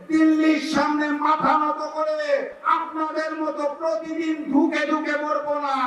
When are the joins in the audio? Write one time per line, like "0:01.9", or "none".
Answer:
0:02.5